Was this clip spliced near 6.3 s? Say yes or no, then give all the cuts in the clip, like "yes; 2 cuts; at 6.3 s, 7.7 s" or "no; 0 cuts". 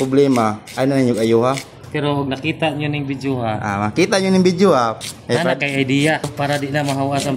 yes; 3 cuts; at 1.8 s, 5.0 s, 6.3 s